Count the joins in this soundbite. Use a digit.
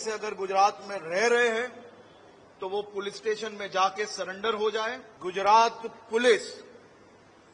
1